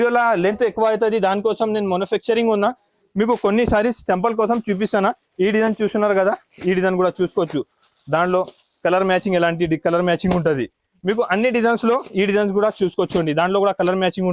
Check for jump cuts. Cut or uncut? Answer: uncut